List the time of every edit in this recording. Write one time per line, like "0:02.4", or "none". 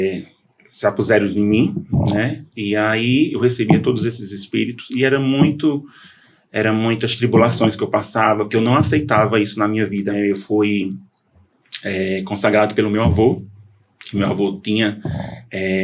0:10.2